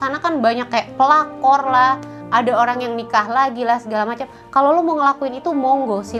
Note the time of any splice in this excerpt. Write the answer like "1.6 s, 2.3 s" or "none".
none